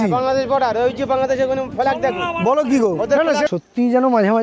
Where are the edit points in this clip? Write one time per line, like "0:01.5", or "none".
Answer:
0:03.5